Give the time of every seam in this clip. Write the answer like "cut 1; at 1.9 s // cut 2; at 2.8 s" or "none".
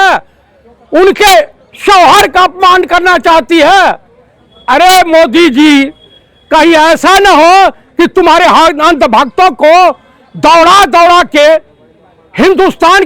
none